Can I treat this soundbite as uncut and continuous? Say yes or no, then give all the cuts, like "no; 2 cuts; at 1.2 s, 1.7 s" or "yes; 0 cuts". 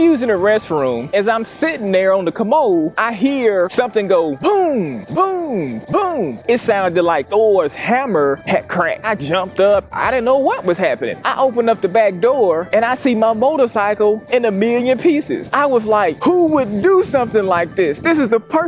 yes; 0 cuts